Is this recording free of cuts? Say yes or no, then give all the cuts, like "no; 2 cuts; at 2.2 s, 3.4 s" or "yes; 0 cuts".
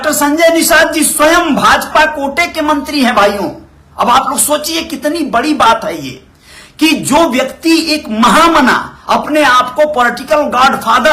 yes; 0 cuts